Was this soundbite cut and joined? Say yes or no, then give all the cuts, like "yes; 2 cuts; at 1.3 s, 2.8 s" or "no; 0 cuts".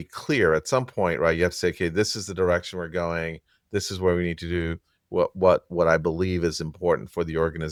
no; 0 cuts